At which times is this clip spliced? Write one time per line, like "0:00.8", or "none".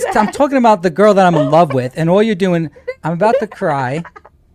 none